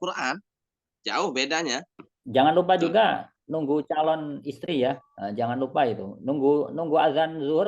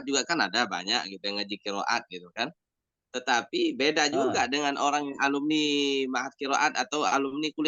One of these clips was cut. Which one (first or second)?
first